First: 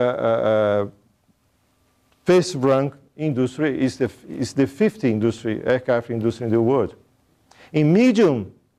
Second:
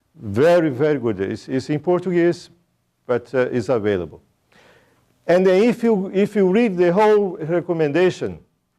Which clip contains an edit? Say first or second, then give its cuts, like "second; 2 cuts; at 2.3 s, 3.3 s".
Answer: second; 1 cut; at 3.1 s